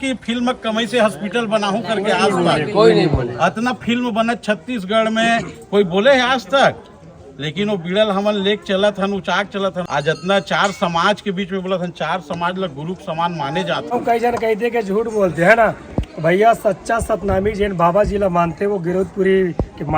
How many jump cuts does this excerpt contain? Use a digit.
2